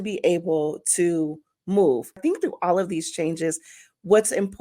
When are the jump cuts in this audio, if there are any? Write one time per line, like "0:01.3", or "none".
0:02.2